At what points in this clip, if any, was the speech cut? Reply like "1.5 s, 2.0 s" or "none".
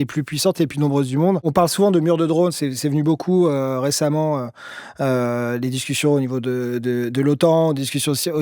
1.5 s